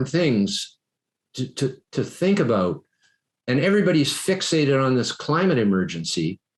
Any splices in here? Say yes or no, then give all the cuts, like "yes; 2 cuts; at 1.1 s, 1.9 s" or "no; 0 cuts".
no; 0 cuts